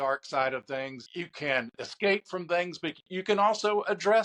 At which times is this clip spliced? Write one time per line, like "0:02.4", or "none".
0:01.0